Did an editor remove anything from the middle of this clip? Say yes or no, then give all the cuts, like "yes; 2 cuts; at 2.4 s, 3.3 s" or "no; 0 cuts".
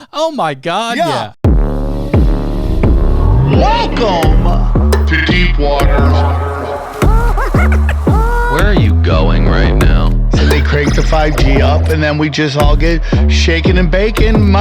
yes; 1 cut; at 1.3 s